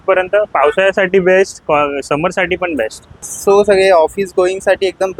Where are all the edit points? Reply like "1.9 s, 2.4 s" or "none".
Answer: 3.3 s